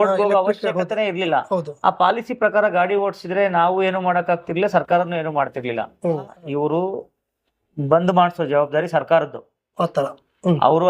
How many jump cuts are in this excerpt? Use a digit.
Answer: 1